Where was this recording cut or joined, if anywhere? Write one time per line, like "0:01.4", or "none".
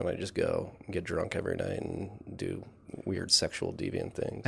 none